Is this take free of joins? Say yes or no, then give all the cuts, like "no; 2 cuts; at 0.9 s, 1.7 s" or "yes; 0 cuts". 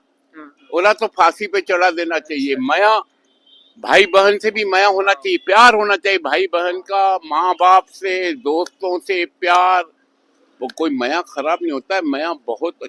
yes; 0 cuts